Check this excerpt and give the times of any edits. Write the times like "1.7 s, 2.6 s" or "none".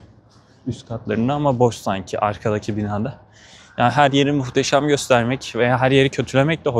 none